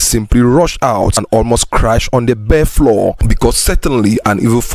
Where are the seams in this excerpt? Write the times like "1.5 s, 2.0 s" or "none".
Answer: 1.1 s